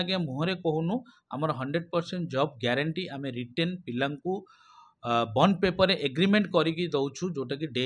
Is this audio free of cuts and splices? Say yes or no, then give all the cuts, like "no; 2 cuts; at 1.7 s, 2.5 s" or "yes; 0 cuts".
yes; 0 cuts